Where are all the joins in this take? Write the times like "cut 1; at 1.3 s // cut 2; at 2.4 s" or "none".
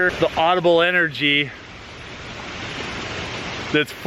none